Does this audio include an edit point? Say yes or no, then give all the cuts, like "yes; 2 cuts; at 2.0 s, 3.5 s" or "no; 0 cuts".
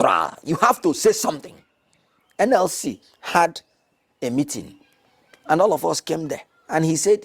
no; 0 cuts